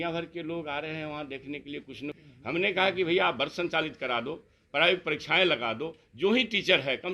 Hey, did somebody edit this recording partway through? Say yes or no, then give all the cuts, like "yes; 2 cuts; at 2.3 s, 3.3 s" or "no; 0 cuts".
yes; 1 cut; at 2.3 s